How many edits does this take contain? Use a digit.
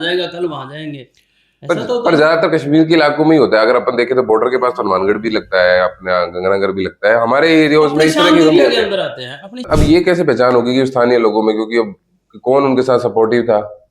1